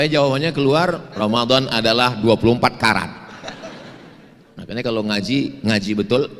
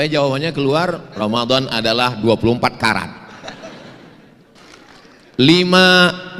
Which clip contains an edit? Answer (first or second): second